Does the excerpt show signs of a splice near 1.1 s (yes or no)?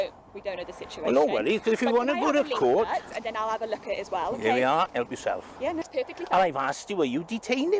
no